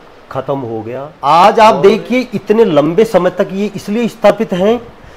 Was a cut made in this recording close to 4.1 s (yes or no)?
no